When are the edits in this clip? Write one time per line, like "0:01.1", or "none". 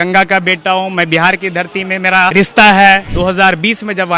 0:02.3
0:03.1